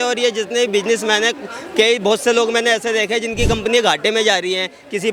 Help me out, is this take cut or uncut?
uncut